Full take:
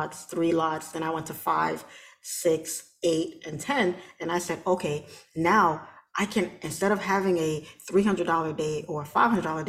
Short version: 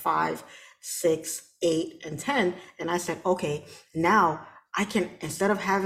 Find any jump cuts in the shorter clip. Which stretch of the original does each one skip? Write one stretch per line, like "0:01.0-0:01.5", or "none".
none

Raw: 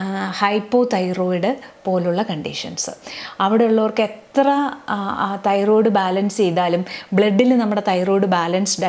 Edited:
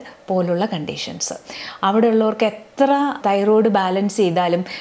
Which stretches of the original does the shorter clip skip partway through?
0:04.7-0:05.4

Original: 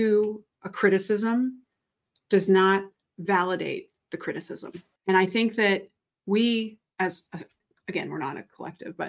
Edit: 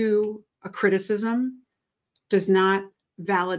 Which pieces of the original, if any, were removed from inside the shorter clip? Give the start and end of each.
none

